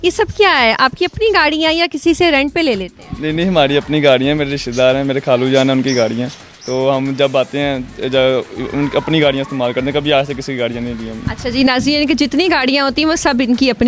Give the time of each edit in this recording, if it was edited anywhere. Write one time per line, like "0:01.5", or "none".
none